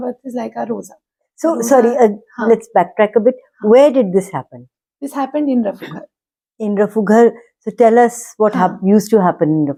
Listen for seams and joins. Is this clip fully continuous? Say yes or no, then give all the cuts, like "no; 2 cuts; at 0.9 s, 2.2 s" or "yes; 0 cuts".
yes; 0 cuts